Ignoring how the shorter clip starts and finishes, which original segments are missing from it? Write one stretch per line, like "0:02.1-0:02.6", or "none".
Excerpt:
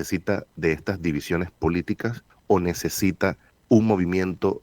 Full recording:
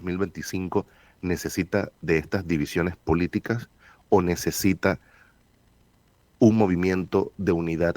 0:03.7-0:03.9
0:05.1-0:06.2